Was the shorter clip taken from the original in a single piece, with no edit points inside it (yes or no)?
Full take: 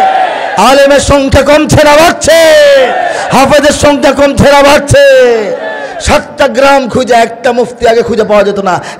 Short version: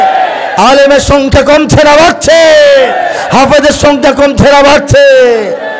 yes